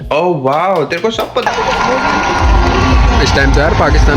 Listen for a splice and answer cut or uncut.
cut